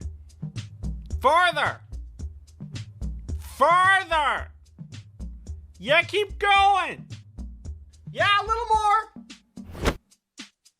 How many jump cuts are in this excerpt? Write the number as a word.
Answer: zero